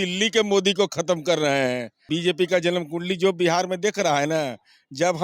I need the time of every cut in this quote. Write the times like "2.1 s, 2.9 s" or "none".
1.9 s